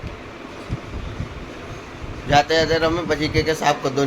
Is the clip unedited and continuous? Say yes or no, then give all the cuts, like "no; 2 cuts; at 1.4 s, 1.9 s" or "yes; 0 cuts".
yes; 0 cuts